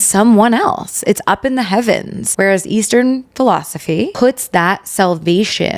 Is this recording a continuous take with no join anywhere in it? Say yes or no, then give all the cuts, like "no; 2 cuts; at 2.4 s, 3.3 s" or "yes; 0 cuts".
no; 2 cuts; at 2.2 s, 4.1 s